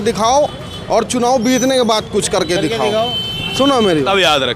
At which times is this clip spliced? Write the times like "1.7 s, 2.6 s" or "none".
none